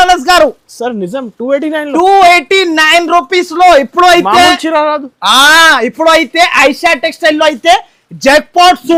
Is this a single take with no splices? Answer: yes; 0 cuts

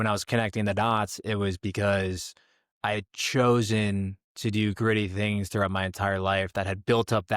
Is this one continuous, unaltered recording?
yes; 0 cuts

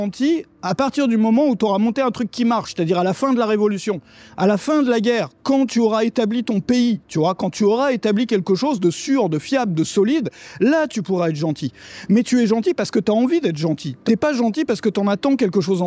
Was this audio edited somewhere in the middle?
no; 0 cuts

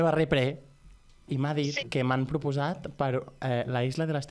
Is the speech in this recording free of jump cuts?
no; 1 cut; at 1.8 s

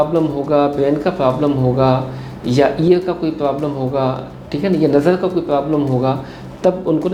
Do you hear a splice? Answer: no; 0 cuts

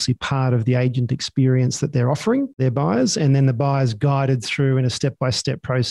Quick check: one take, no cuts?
no; 1 cut; at 2.5 s

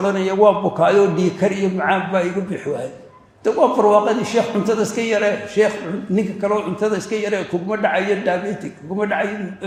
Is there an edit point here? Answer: no; 0 cuts

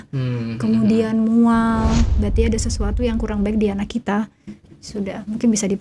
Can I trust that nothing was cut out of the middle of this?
no; 1 cut; at 2.1 s

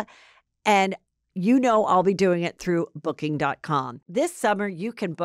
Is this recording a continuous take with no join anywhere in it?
no; 1 cut; at 4.0 s

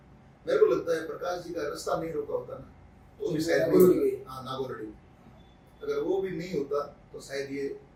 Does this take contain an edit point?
no; 0 cuts

